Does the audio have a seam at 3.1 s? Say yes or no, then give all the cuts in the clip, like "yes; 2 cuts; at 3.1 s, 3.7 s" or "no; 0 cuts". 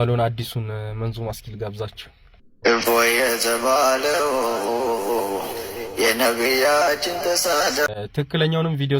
no; 1 cut; at 7.9 s